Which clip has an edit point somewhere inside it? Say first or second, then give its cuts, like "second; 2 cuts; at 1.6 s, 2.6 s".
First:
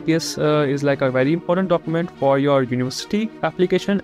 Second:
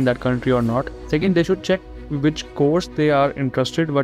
second; 1 cut; at 1.0 s